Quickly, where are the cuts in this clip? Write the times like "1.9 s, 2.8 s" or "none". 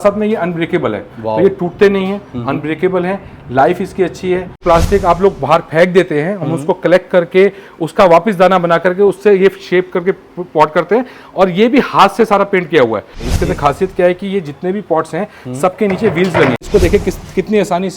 4.6 s, 13.2 s, 16.6 s